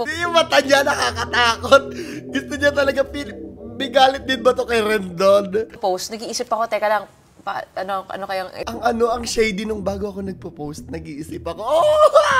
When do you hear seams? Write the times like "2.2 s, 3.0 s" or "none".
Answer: none